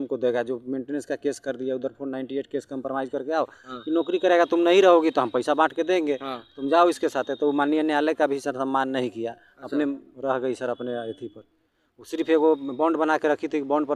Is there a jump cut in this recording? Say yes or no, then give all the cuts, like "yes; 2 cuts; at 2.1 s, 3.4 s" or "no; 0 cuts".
no; 0 cuts